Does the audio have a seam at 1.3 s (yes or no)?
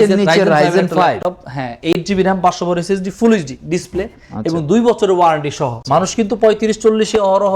no